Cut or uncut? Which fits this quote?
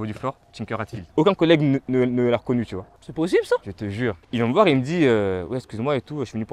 cut